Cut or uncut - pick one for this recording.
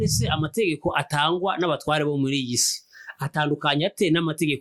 uncut